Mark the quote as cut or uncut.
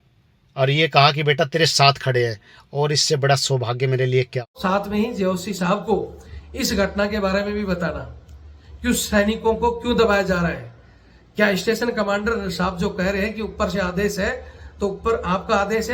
cut